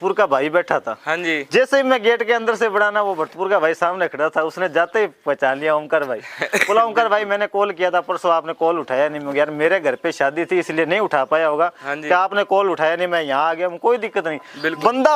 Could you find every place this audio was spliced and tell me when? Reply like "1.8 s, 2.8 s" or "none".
none